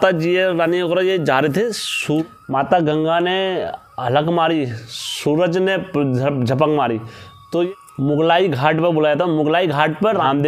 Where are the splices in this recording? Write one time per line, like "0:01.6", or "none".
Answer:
none